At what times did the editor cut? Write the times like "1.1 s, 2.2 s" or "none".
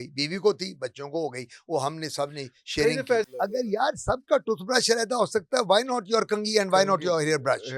3.3 s